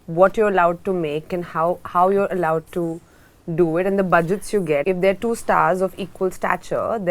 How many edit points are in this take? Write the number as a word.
one